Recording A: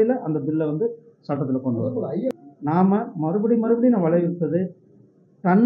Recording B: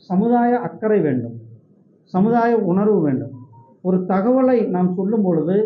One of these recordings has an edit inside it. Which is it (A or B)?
A